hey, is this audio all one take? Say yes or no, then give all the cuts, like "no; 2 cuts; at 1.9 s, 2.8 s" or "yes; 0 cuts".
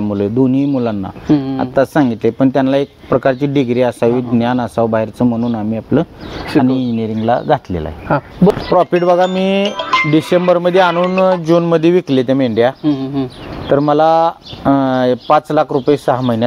no; 1 cut; at 8.5 s